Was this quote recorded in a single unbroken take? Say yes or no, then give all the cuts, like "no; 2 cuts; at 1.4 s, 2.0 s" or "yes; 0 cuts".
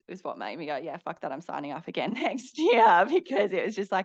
yes; 0 cuts